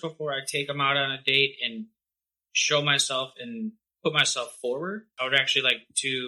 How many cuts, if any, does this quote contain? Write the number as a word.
one